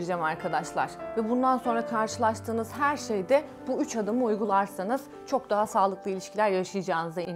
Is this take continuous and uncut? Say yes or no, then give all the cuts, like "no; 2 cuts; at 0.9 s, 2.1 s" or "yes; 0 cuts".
yes; 0 cuts